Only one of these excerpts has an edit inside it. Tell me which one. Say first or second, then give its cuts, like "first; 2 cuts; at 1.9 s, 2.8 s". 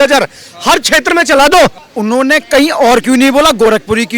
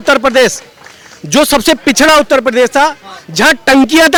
first; 1 cut; at 1.9 s